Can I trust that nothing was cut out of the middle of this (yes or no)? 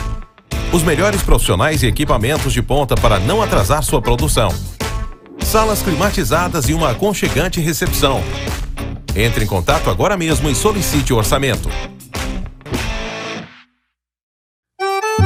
yes